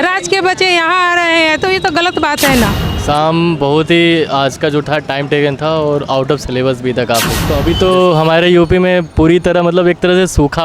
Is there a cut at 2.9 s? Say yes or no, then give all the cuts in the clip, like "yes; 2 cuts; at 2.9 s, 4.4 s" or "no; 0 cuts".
yes; 2 cuts; at 2.9 s, 7.4 s